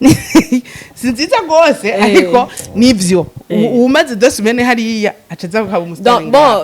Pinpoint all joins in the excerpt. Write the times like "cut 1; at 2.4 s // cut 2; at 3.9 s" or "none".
none